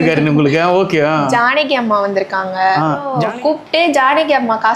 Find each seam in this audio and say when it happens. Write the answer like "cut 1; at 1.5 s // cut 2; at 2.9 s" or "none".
cut 1; at 3.1 s

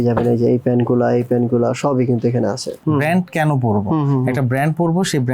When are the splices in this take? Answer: cut 1; at 2.8 s

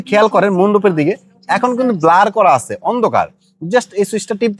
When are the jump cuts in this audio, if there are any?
none

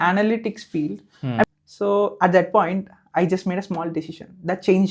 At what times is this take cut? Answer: cut 1; at 1.4 s

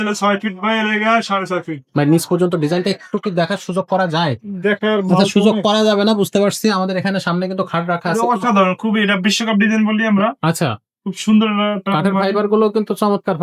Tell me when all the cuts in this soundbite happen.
none

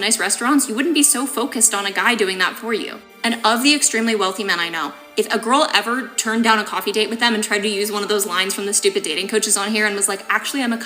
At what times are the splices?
cut 1; at 3.1 s

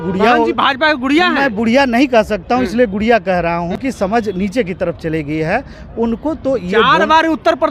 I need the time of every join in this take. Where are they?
cut 1; at 3.8 s

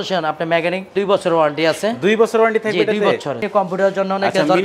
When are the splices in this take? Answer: cut 1; at 0.9 s // cut 2; at 3.4 s

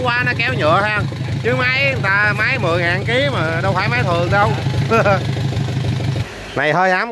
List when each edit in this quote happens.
cut 1; at 6.2 s

